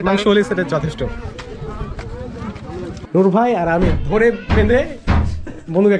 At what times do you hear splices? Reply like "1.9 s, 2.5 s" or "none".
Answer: 3.0 s